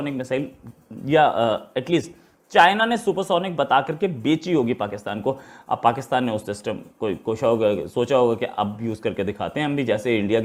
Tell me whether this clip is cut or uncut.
uncut